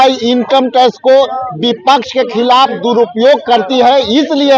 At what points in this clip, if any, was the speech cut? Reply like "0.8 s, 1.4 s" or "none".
none